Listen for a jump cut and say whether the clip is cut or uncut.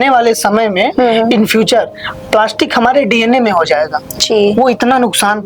uncut